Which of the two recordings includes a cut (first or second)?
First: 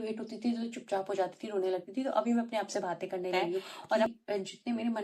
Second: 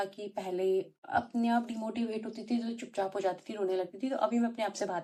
first